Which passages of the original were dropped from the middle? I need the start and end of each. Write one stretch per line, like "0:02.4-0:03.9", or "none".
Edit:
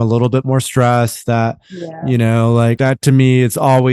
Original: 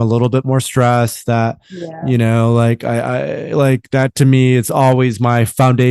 0:02.8-0:03.9